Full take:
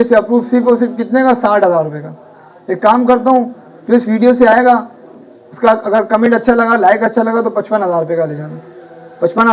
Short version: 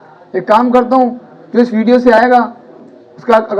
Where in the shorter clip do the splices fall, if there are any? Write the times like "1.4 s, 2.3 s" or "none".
none